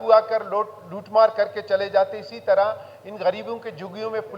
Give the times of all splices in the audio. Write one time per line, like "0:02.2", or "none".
none